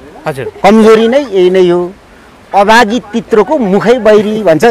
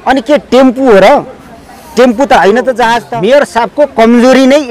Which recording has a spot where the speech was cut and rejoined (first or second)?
second